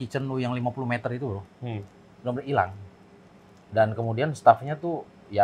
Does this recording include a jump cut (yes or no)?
no